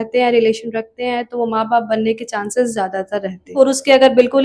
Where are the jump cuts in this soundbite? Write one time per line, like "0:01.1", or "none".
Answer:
0:03.5